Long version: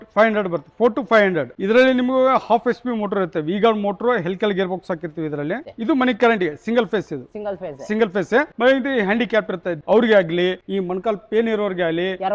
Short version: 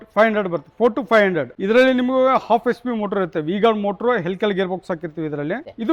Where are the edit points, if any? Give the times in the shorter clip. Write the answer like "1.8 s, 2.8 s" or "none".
none